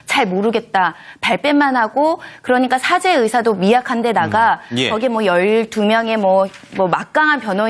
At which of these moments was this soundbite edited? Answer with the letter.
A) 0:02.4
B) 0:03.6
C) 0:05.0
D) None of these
D